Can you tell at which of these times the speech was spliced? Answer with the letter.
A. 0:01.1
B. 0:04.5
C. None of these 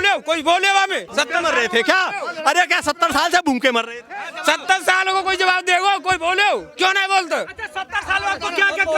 A